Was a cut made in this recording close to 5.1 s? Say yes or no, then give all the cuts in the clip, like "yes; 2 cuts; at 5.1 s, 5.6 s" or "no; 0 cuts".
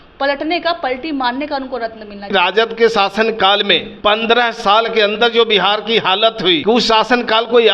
no; 3 cuts; at 2.3 s, 3.9 s, 6.6 s